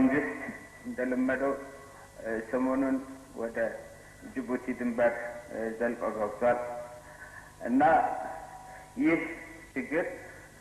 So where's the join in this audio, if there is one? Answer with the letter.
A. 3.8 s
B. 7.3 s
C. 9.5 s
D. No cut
D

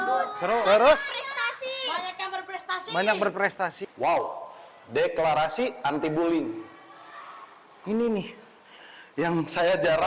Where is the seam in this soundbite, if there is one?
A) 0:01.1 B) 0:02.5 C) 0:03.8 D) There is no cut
C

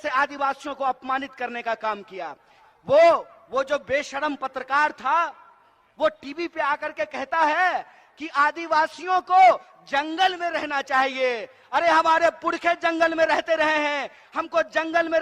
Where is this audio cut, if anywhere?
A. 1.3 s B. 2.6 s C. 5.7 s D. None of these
B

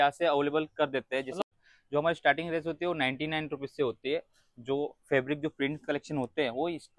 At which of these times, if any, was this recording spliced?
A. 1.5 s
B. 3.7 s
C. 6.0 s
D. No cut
A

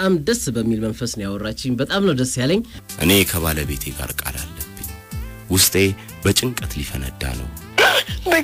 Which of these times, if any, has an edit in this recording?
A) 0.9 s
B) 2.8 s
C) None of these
B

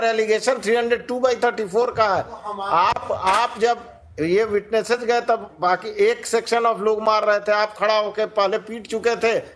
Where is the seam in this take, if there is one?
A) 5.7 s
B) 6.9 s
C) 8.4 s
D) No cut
D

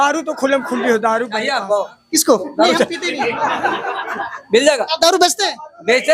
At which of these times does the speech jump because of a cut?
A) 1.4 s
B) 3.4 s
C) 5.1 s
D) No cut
A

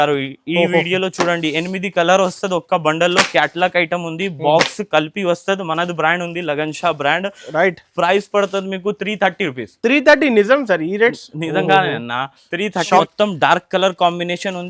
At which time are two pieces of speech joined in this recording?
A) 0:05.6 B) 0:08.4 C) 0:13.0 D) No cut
C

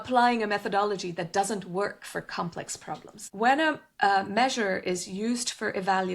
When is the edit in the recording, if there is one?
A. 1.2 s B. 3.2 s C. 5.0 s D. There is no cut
B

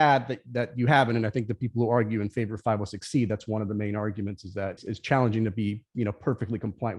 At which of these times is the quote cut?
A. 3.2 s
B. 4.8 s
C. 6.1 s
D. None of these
B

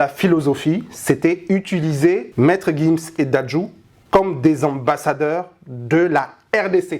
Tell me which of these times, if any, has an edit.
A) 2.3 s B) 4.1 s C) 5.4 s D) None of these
A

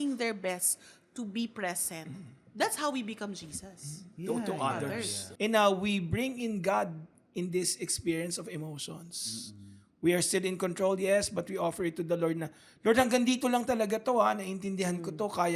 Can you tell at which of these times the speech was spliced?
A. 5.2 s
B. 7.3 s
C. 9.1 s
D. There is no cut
A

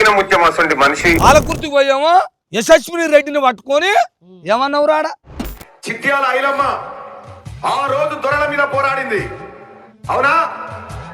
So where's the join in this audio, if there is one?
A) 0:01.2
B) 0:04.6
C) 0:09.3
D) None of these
A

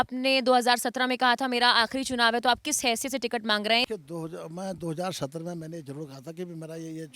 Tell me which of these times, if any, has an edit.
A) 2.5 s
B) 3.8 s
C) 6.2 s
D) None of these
B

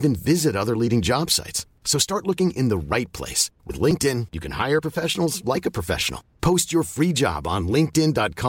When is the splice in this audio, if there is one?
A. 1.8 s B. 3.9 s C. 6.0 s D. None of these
D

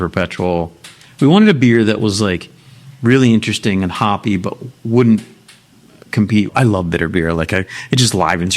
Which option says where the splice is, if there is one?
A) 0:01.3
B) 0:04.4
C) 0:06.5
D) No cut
C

